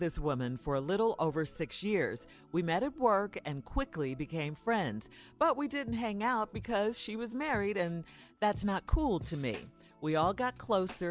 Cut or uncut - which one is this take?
uncut